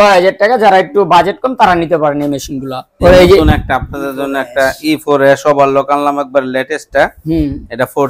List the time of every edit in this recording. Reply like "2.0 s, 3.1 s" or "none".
3.0 s